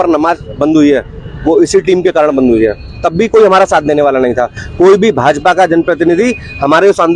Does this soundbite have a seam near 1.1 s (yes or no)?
no